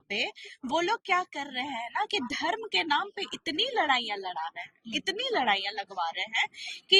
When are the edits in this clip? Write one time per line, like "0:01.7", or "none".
none